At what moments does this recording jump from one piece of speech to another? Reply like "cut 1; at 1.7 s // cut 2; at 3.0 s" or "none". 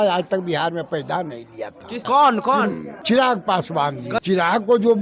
cut 1; at 2.0 s // cut 2; at 2.9 s // cut 3; at 4.2 s